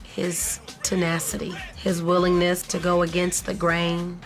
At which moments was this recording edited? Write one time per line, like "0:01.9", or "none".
none